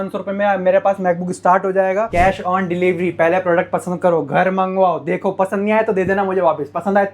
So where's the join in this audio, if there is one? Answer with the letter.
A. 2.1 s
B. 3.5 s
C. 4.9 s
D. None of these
A